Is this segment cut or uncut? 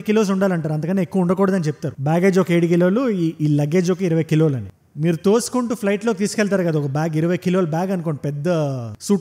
uncut